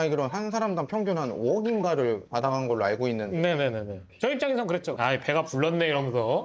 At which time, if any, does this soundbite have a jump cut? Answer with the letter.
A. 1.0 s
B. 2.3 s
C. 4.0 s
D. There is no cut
C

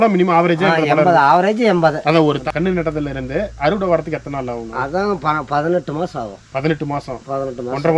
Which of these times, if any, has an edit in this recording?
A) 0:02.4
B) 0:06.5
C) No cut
A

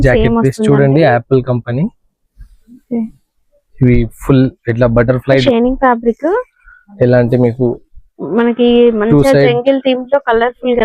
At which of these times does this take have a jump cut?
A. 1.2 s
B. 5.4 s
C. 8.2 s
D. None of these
B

